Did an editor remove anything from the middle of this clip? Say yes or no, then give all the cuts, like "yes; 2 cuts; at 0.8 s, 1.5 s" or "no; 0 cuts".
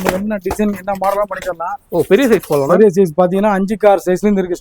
no; 0 cuts